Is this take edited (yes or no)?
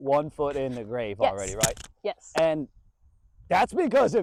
no